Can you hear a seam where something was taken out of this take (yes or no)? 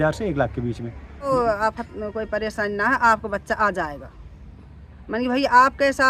yes